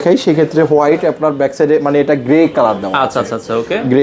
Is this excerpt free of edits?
yes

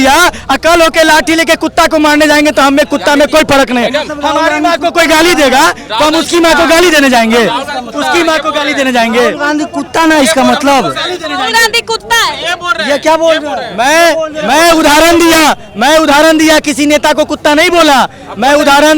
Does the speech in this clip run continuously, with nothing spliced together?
yes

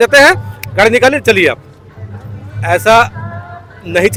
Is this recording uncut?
yes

